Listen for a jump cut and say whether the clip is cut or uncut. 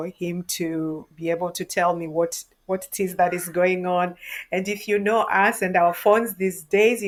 uncut